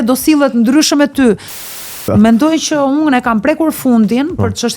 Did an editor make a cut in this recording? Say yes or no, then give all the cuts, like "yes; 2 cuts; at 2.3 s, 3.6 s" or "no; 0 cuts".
yes; 1 cut; at 1.8 s